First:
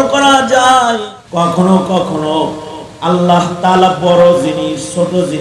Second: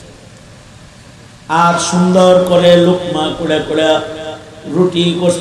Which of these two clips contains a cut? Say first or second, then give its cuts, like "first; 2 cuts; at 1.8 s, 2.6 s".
first; 1 cut; at 1.1 s